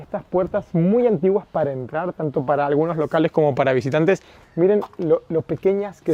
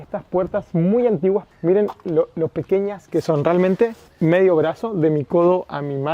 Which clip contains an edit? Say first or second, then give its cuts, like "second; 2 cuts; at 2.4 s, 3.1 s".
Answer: second; 2 cuts; at 1.5 s, 4.1 s